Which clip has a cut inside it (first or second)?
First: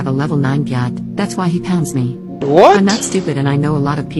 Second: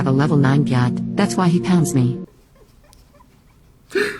second